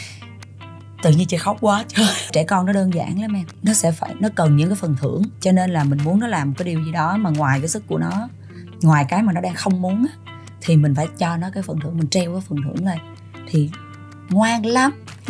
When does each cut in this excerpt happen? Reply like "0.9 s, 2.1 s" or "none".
2.3 s, 3.5 s, 5.4 s

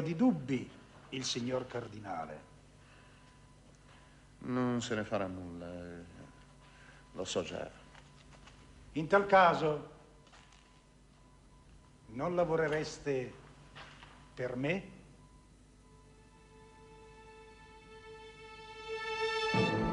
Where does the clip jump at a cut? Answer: none

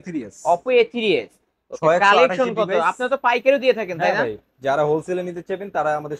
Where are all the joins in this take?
none

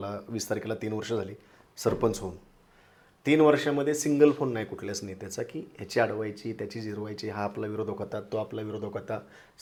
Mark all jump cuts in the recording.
none

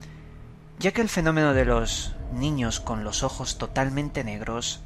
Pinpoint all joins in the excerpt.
none

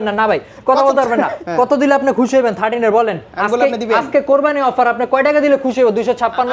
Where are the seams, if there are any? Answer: 1.4 s

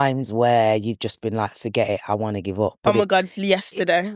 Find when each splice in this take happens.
none

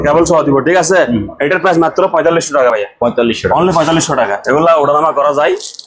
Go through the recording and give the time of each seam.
none

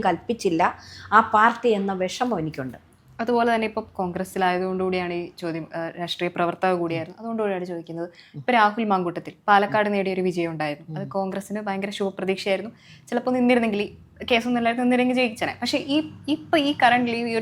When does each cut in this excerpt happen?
none

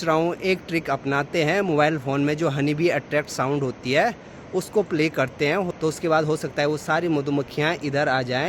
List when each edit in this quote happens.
none

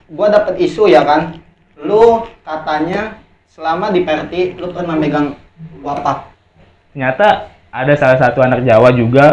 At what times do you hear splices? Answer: 6.4 s

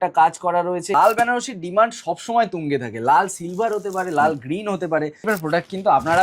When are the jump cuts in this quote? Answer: 0.9 s, 5.3 s

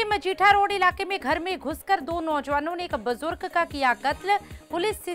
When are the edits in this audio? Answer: none

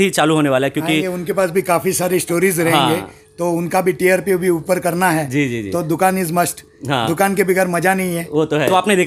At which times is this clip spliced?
none

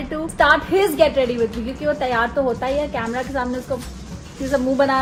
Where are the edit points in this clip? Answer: none

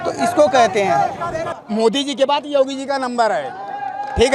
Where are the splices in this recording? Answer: 1.6 s

